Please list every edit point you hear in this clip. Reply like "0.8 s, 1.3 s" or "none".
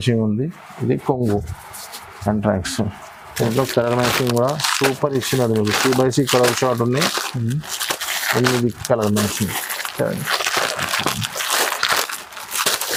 none

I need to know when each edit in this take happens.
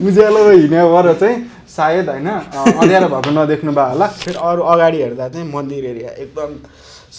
4.2 s

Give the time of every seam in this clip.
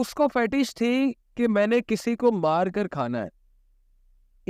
none

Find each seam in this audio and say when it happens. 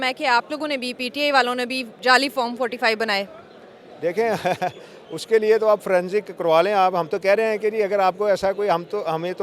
none

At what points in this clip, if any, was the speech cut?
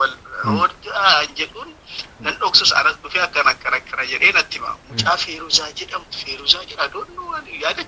none

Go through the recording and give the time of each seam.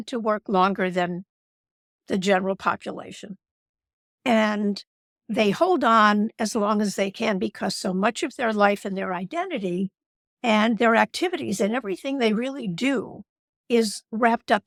none

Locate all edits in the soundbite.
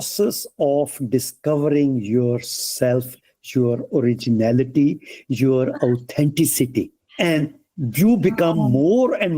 7.0 s

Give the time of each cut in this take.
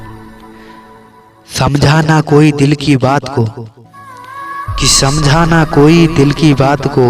0.9 s

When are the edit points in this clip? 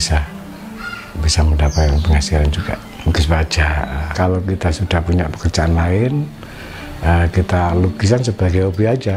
4.0 s

